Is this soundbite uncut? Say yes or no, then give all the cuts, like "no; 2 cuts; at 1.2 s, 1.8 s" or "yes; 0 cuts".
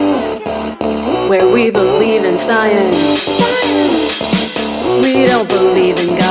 yes; 0 cuts